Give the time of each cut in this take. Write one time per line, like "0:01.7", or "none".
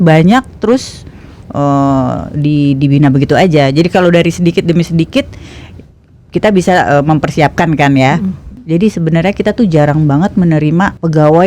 0:08.5